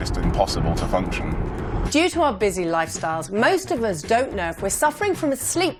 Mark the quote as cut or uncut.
uncut